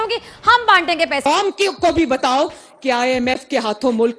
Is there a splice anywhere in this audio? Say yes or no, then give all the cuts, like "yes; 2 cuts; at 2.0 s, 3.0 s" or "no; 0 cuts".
yes; 1 cut; at 1.2 s